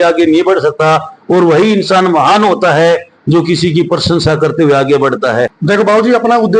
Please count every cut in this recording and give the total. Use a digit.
1